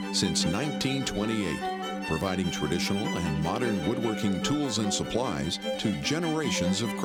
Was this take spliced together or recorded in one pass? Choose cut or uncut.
uncut